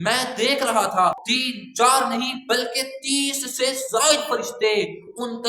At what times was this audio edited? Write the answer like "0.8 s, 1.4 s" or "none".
1.3 s